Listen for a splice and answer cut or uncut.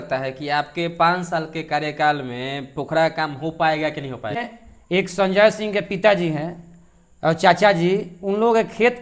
cut